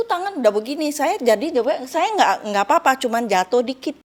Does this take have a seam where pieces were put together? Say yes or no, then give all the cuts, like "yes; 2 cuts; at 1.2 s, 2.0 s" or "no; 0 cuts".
no; 0 cuts